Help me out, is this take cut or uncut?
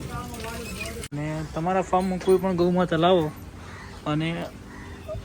cut